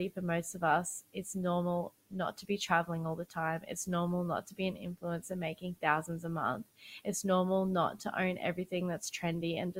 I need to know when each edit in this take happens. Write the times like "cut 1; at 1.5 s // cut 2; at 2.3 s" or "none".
none